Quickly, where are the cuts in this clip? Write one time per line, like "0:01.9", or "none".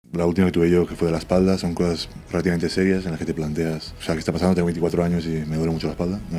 0:04.0